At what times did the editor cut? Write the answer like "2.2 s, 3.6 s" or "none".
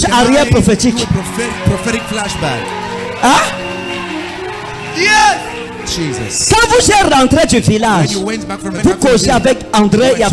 8.7 s